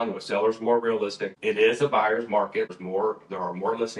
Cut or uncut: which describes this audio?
cut